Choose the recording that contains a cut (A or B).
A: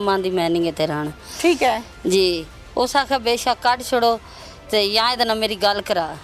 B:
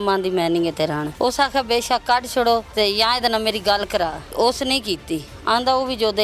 B